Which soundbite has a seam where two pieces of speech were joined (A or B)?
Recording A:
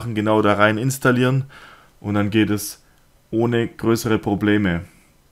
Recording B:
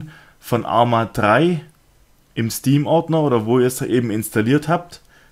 A